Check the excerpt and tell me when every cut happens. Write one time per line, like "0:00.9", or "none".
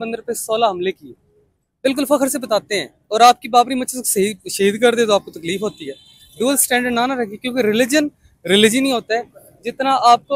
none